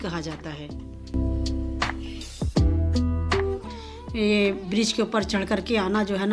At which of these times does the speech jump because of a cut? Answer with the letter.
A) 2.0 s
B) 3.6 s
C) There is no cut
B